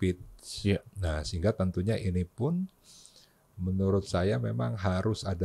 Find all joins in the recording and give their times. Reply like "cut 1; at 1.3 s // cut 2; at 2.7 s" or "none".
none